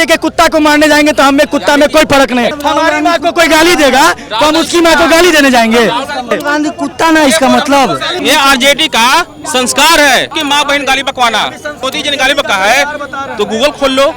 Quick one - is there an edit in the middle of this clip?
yes; 5 cuts; at 2.5 s, 6.3 s, 8.2 s, 10.3 s, 11.8 s

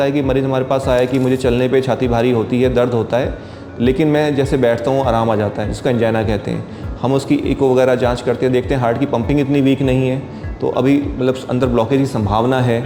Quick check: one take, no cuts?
yes; 0 cuts

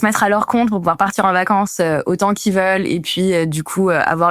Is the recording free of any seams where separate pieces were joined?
yes; 0 cuts

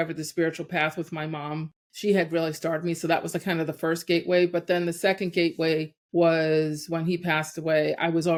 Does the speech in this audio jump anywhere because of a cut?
no; 0 cuts

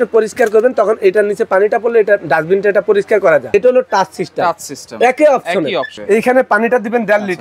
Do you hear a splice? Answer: yes; 2 cuts; at 3.5 s, 5.9 s

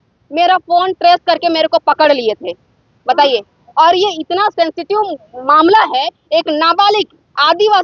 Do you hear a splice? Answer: no; 0 cuts

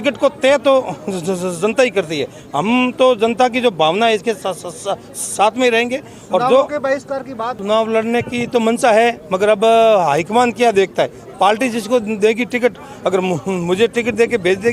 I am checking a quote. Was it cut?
yes; 1 cut; at 7.6 s

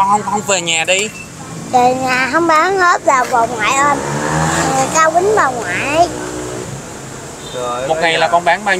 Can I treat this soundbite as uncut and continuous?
no; 1 cut; at 6.7 s

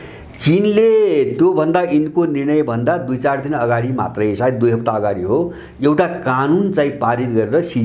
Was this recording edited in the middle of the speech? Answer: no; 0 cuts

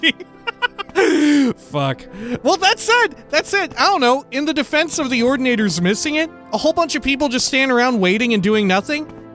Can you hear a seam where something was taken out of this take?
yes; 1 cut; at 6.4 s

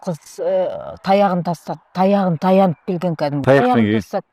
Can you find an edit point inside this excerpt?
yes; 1 cut; at 3.4 s

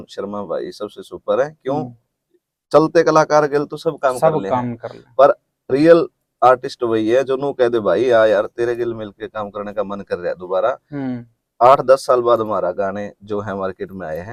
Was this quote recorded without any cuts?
yes; 0 cuts

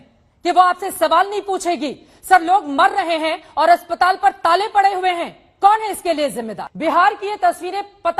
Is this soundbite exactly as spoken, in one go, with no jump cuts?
no; 1 cut; at 6.6 s

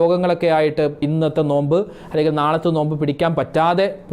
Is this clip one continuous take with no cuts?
no; 1 cut; at 1.0 s

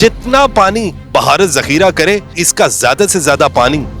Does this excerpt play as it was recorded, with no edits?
no; 2 cuts; at 1.0 s, 2.4 s

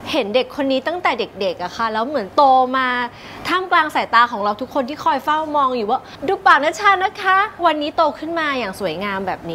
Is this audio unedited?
no; 2 cuts; at 6.1 s, 7.6 s

